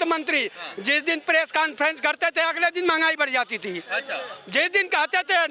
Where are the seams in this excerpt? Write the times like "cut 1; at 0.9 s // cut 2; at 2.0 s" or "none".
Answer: none

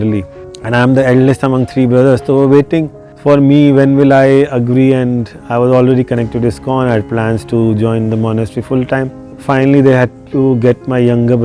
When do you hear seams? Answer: none

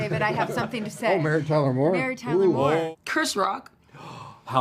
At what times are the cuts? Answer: cut 1; at 2.9 s

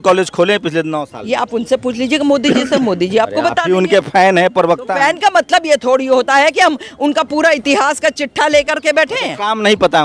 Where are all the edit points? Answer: none

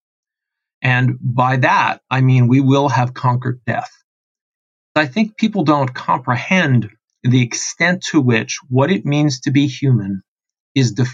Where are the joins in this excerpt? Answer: cut 1; at 5.0 s

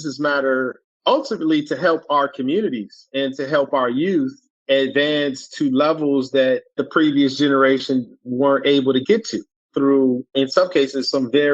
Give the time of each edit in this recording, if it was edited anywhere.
cut 1; at 0.9 s

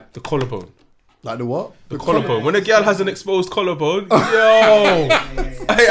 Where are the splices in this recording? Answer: none

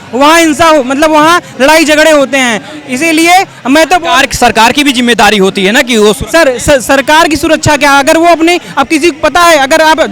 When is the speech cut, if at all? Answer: none

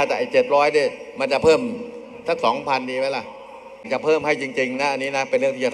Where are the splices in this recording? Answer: cut 1; at 3.9 s

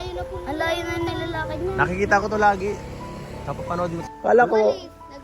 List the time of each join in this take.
cut 1; at 4.0 s

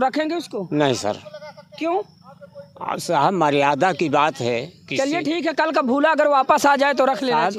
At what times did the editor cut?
none

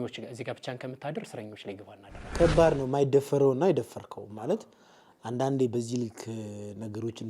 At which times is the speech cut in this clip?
cut 1; at 2.3 s

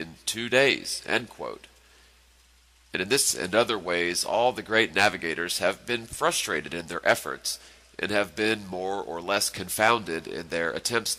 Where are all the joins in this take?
cut 1; at 1.7 s

